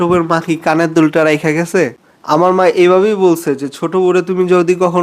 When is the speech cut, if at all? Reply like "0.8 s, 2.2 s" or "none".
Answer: 2.0 s